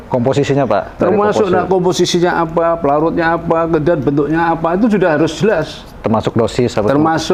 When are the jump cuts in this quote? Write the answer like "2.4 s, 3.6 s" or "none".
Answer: none